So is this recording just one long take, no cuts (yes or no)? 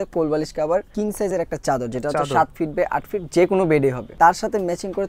no